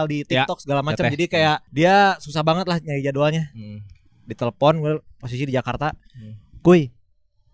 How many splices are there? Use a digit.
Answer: 1